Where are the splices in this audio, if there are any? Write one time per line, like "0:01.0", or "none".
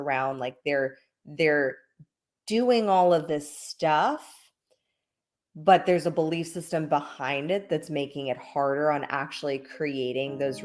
none